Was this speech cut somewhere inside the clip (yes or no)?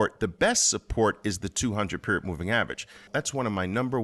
yes